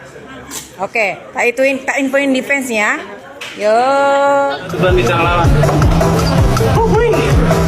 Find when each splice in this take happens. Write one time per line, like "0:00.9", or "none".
0:00.9
0:04.6